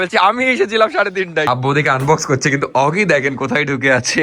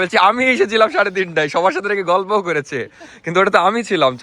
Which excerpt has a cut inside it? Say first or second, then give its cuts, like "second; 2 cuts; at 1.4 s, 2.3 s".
first; 1 cut; at 1.5 s